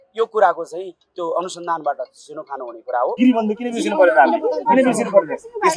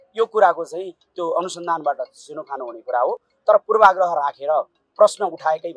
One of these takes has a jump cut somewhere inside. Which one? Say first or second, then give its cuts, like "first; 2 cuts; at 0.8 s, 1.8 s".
first; 1 cut; at 3.1 s